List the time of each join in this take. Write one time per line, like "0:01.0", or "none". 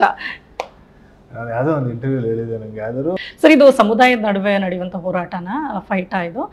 0:03.1